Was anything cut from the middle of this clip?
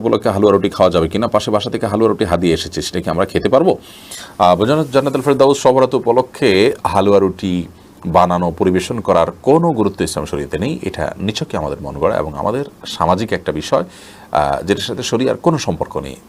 no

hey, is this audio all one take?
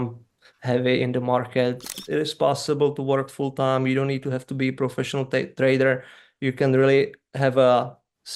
no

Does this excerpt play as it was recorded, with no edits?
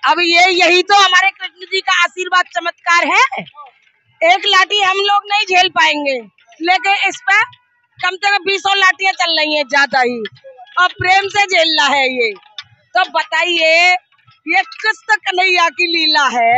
yes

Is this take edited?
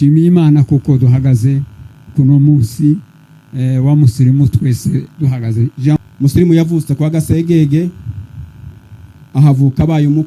yes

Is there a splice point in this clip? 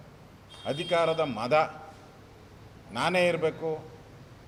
no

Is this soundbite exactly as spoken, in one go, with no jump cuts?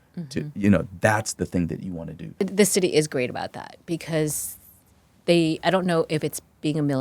no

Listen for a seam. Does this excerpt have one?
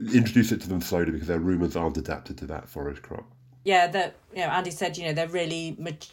no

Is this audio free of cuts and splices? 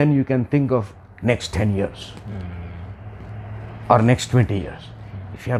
yes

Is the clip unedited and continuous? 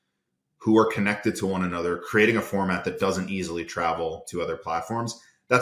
yes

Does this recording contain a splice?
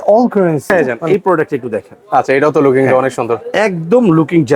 yes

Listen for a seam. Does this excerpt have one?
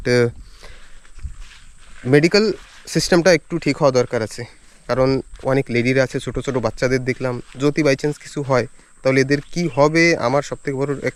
no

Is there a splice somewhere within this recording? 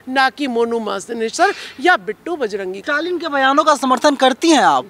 yes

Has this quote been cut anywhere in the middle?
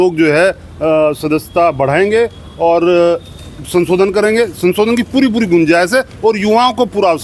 no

